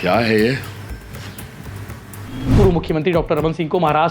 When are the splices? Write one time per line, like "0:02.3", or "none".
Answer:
0:02.5